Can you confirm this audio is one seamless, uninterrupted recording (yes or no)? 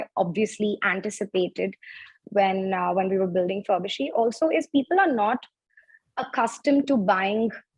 yes